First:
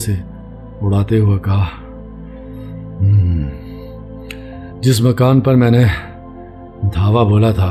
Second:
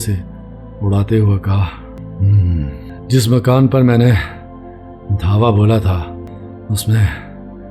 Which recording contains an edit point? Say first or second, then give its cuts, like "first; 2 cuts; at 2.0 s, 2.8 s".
second; 3 cuts; at 1.9 s, 2.9 s, 6.3 s